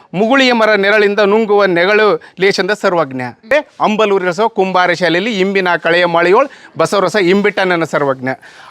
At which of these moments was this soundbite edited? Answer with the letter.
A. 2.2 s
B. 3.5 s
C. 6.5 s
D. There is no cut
B